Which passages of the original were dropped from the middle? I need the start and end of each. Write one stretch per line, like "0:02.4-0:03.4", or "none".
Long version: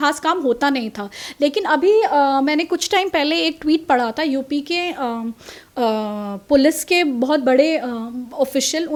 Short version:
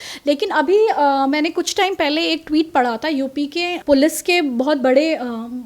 0:04.9-0:06.4